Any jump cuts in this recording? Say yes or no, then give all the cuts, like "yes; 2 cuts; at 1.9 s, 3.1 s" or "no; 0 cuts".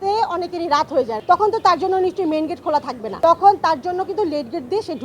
yes; 2 cuts; at 1.1 s, 3.0 s